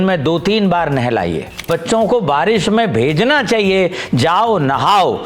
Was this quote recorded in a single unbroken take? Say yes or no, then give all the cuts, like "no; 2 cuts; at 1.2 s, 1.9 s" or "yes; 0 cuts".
no; 1 cut; at 1.7 s